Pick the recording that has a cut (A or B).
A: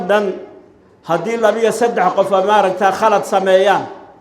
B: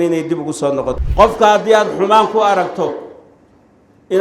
B